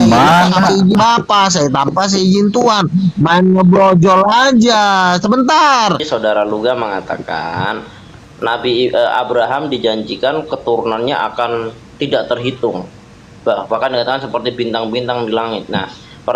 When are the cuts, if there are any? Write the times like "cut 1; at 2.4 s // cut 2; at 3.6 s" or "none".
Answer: cut 1; at 6.0 s

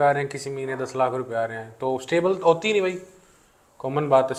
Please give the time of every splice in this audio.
none

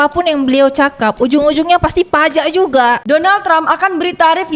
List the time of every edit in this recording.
cut 1; at 3.0 s

